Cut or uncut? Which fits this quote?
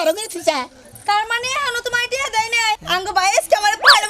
cut